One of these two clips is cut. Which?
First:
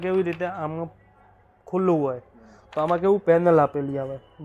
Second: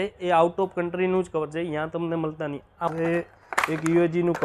second; 1 cut; at 2.9 s

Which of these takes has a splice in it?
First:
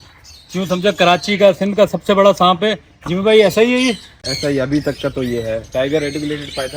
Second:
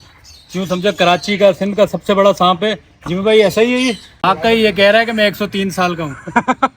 second; 1 cut; at 4.2 s

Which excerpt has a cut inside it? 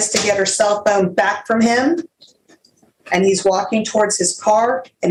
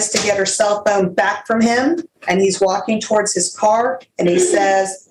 second; 1 cut; at 2.1 s

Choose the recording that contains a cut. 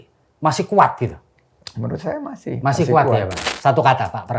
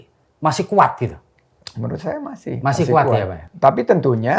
first; 1 cut; at 3.4 s

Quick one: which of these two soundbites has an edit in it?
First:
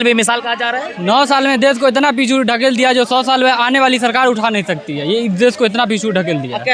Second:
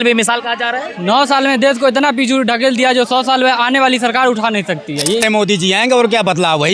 second; 1 cut; at 5.2 s

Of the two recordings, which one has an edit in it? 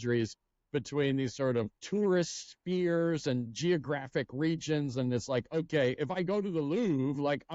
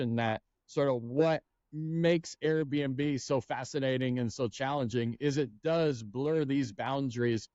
first; 1 cut; at 1.8 s

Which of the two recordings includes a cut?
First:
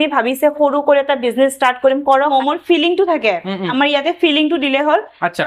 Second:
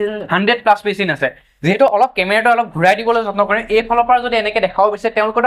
first; 1 cut; at 2.3 s

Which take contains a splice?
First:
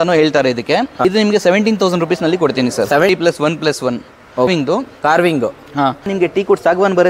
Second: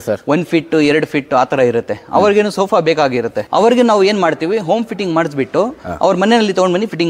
first; 4 cuts; at 0.9 s, 3.1 s, 4.5 s, 6.1 s

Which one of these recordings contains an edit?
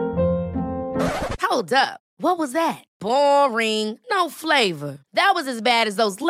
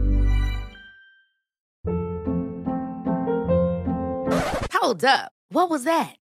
second; 1 cut; at 1.8 s

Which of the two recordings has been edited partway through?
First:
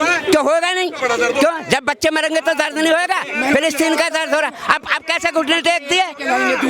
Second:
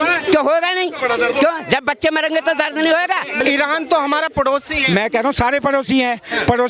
second; 1 cut; at 3.4 s

